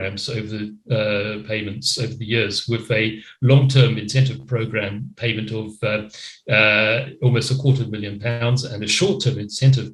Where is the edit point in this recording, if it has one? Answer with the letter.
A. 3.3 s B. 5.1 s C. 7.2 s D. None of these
D